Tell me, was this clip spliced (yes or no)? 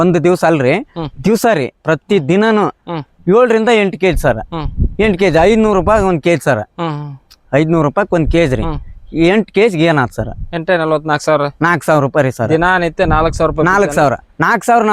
no